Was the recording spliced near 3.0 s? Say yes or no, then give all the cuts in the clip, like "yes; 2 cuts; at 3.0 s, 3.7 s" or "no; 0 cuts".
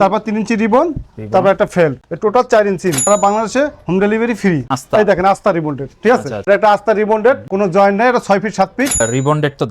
yes; 4 cuts; at 2.1 s, 3.0 s, 4.7 s, 9.0 s